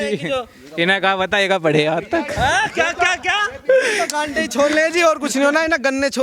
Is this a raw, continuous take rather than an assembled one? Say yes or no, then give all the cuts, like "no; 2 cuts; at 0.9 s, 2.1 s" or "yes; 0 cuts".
yes; 0 cuts